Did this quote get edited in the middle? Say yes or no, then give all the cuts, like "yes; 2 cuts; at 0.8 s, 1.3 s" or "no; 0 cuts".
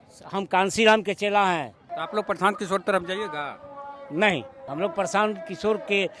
yes; 2 cuts; at 1.9 s, 4.6 s